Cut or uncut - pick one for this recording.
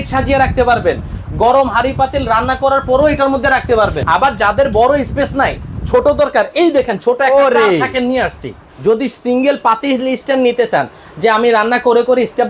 cut